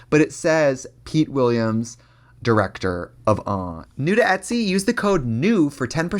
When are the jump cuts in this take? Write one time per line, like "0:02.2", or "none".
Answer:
0:03.8